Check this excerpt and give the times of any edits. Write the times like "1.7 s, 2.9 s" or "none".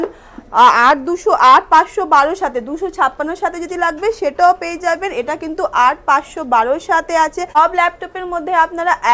7.6 s